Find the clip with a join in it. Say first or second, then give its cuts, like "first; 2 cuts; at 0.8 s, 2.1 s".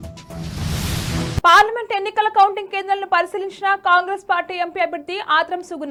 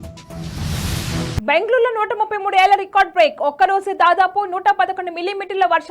second; 1 cut; at 1.4 s